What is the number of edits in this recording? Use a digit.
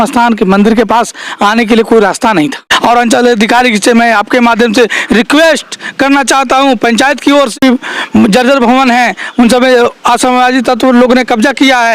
2